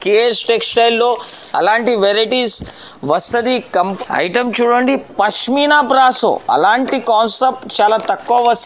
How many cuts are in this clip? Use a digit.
1